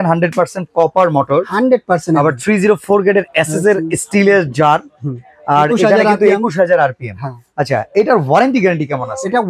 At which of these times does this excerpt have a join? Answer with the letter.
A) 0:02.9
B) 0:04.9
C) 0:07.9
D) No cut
D